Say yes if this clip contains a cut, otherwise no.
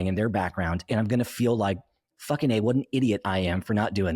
yes